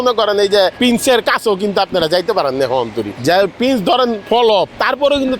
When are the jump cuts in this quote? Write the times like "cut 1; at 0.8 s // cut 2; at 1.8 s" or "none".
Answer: cut 1; at 0.8 s // cut 2; at 3.1 s // cut 3; at 4.4 s